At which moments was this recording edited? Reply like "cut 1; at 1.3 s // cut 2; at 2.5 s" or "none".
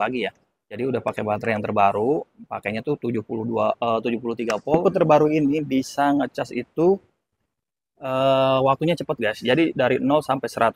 cut 1; at 4.8 s

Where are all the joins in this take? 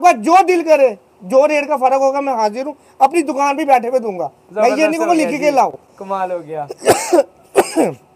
none

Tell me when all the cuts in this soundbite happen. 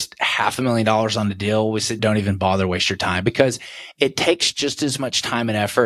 none

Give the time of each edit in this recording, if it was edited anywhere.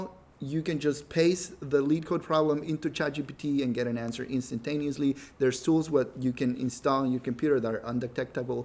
none

